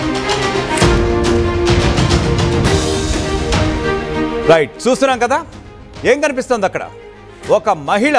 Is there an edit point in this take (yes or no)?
yes